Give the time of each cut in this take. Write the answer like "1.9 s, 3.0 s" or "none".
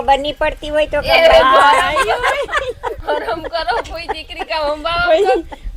none